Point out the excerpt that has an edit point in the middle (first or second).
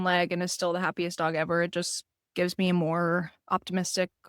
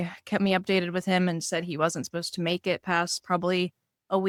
first